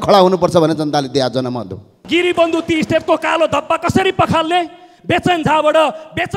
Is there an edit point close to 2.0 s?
yes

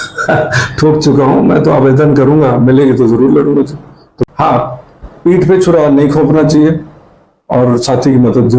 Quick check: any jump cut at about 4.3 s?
yes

